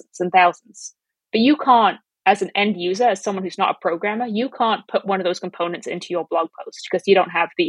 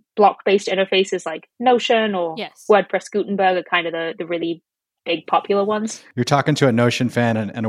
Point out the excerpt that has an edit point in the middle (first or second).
second